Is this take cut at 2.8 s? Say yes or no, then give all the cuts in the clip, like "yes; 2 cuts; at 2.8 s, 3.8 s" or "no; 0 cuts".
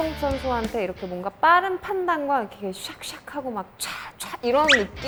no; 0 cuts